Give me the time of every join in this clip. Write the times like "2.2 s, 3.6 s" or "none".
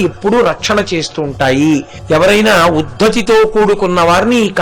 1.9 s